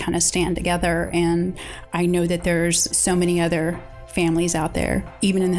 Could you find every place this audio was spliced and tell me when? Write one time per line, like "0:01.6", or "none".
0:01.7
0:02.9